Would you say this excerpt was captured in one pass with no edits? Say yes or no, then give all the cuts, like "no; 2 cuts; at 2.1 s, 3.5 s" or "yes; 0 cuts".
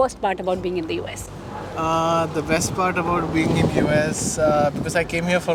yes; 0 cuts